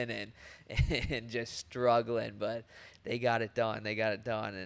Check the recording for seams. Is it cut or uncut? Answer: uncut